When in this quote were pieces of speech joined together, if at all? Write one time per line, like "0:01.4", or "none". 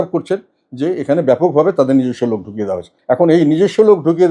0:02.9